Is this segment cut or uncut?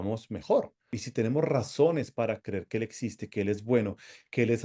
cut